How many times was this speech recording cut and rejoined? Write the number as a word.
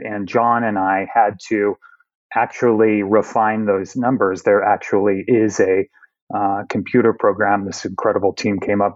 zero